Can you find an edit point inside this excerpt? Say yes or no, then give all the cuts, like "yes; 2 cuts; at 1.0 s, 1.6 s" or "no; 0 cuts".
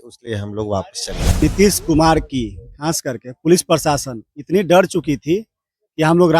yes; 1 cut; at 1.4 s